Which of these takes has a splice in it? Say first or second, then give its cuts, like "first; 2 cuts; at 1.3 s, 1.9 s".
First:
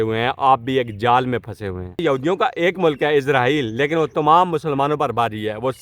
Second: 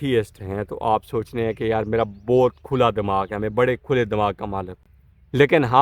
first; 1 cut; at 2.0 s